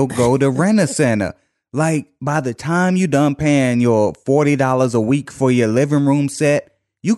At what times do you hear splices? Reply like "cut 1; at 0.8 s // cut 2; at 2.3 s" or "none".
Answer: cut 1; at 2.1 s